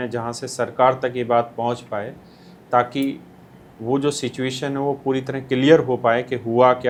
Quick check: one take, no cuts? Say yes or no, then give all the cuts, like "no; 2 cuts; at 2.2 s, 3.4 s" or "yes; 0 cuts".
yes; 0 cuts